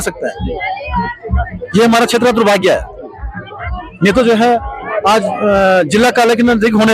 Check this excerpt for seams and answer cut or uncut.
uncut